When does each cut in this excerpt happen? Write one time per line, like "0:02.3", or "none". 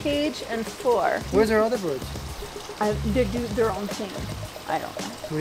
none